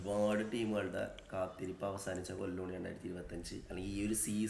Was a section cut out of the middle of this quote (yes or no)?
no